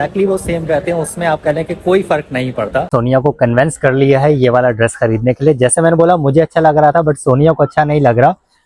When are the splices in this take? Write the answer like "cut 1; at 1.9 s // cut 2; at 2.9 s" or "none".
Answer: cut 1; at 2.9 s